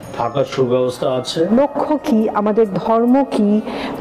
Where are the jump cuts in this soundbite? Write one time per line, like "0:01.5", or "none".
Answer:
0:01.5